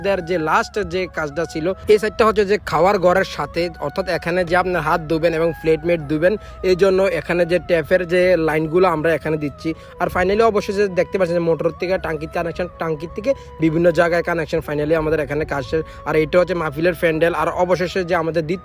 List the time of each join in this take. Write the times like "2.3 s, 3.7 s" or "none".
none